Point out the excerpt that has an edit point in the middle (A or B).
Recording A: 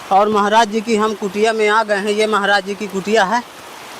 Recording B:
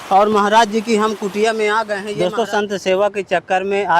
B